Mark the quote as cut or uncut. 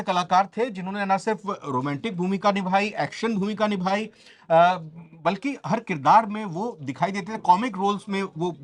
uncut